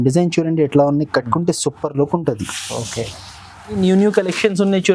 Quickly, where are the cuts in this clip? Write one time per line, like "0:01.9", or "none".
0:03.8